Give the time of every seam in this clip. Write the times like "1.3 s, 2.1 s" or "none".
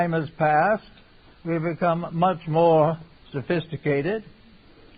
1.0 s